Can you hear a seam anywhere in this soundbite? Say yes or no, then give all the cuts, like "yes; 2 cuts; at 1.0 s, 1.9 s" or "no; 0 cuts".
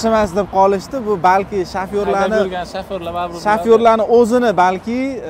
no; 0 cuts